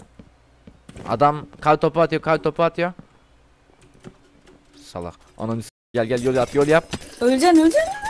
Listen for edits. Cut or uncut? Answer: uncut